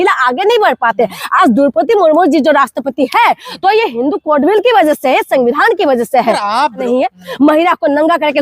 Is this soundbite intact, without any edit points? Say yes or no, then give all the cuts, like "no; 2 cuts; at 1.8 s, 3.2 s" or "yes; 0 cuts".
no; 1 cut; at 6.8 s